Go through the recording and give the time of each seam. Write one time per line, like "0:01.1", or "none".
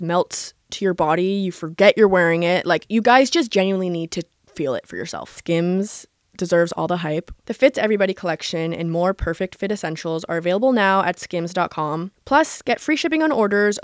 0:05.3